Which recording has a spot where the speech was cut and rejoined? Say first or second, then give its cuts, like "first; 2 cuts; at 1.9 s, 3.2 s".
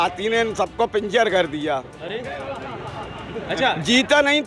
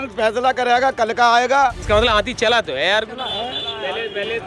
second; 1 cut; at 1.8 s